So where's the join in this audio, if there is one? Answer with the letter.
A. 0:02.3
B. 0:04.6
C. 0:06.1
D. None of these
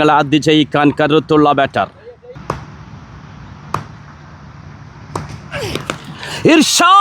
A